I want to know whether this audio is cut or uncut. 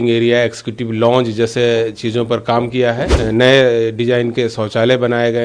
cut